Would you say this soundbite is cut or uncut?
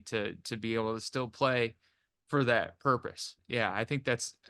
cut